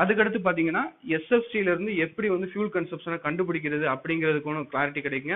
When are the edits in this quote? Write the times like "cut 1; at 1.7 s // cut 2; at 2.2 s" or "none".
none